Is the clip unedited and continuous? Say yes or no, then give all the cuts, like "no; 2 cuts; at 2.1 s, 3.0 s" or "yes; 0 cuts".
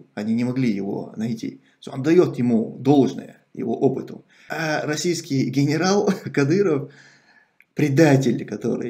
no; 1 cut; at 4.5 s